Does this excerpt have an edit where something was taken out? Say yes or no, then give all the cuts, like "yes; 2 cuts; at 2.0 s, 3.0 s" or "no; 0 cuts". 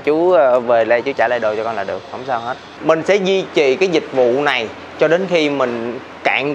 yes; 1 cut; at 2.7 s